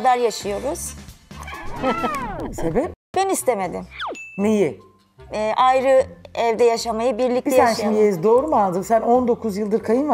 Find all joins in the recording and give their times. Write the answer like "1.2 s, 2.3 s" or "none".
none